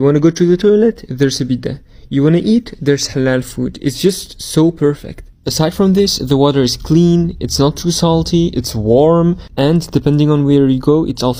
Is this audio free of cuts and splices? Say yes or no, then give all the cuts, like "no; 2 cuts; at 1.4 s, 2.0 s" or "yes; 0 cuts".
yes; 0 cuts